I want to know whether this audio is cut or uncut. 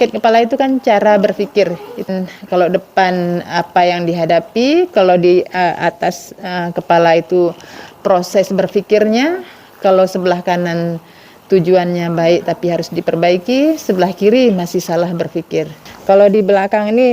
cut